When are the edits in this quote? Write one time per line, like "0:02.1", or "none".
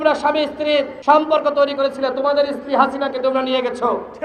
0:00.9